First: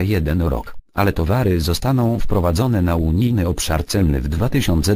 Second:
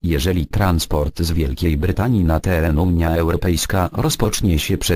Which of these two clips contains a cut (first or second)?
first